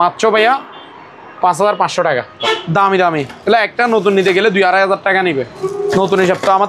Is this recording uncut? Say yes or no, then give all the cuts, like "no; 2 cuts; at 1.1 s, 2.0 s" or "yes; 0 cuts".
no; 2 cuts; at 2.3 s, 5.6 s